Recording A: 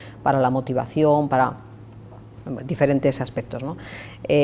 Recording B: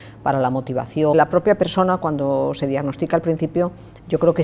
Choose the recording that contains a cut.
B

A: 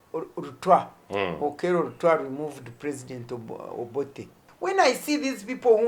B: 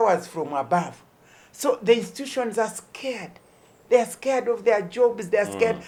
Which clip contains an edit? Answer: A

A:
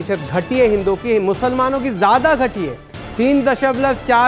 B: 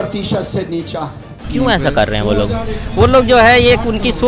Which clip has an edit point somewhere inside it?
B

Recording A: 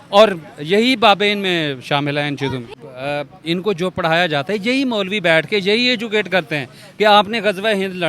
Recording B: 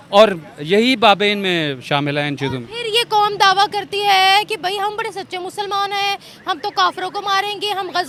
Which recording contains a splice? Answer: A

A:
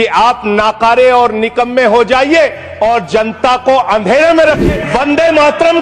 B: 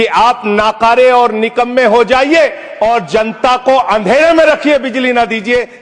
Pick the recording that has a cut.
A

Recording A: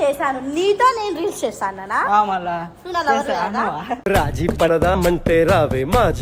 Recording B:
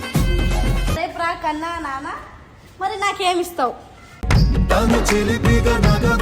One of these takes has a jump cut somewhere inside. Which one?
B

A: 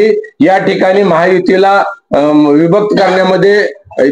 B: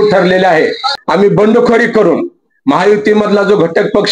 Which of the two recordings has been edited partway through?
B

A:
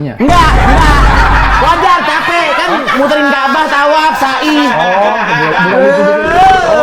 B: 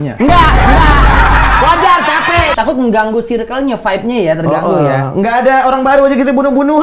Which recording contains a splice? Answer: B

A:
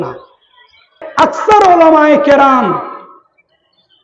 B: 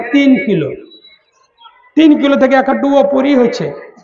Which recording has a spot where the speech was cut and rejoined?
A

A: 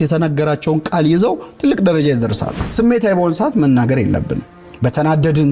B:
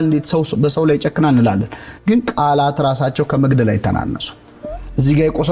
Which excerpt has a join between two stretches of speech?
A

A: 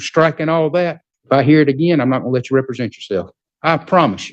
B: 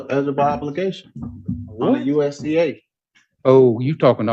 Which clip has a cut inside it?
A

